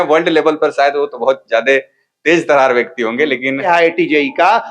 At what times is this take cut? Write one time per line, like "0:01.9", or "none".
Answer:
0:03.7